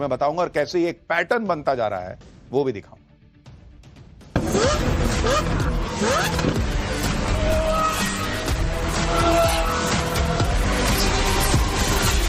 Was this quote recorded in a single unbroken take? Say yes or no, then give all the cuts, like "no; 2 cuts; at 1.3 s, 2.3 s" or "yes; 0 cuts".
yes; 0 cuts